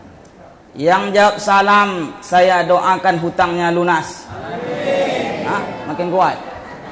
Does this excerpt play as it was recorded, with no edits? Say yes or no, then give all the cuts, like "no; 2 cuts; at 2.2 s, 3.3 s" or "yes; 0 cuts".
yes; 0 cuts